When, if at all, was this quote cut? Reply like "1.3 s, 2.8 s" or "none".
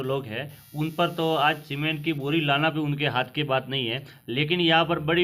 none